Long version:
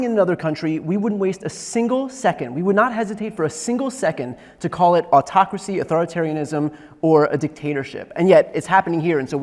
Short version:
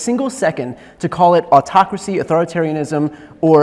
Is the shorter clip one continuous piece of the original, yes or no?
yes